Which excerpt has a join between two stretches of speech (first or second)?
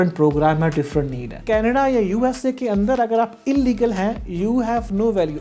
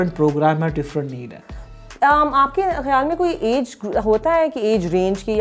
first